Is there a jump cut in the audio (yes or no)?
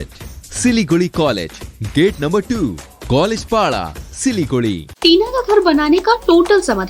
yes